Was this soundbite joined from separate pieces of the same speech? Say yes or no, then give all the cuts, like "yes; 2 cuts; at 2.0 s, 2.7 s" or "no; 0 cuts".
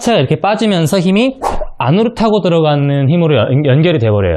no; 0 cuts